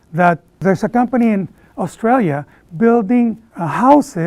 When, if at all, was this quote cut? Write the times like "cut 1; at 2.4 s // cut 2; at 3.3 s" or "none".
none